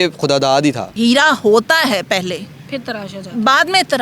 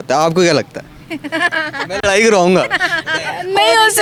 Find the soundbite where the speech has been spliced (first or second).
first